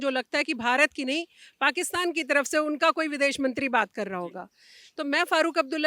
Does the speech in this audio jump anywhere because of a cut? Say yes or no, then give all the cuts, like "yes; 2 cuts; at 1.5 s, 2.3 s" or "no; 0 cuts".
no; 0 cuts